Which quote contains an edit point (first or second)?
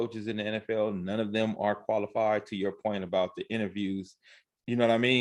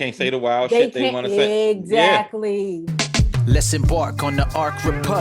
second